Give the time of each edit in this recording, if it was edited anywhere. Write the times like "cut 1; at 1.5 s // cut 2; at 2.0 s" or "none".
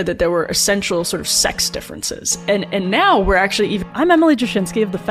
none